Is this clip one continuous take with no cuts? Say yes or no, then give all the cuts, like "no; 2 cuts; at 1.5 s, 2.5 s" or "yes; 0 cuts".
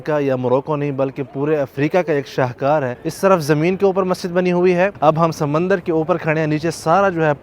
no; 2 cuts; at 3.0 s, 4.9 s